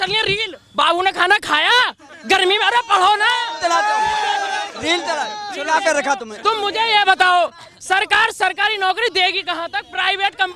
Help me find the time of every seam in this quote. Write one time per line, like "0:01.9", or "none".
none